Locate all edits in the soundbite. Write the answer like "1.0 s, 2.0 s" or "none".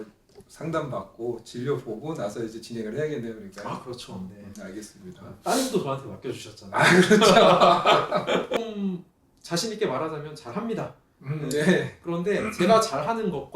8.6 s